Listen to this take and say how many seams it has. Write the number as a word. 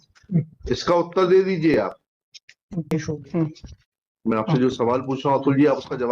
one